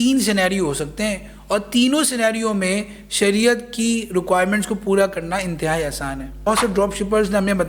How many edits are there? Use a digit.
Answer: 1